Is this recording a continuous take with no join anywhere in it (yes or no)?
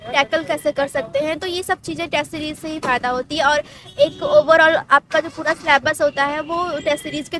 yes